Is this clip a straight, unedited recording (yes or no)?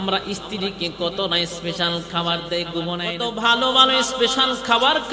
no